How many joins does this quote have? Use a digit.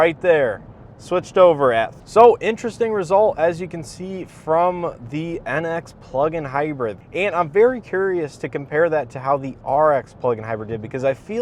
2